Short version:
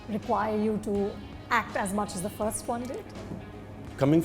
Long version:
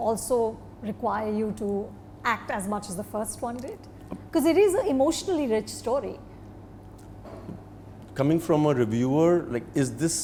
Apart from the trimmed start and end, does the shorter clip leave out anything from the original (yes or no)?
yes